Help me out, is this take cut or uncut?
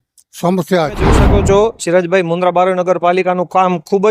cut